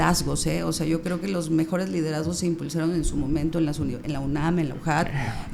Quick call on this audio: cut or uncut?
uncut